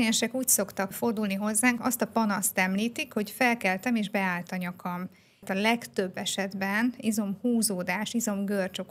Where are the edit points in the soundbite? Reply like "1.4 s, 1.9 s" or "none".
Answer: 0.9 s, 1.8 s, 5.4 s